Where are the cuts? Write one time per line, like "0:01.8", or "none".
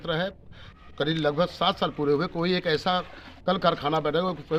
none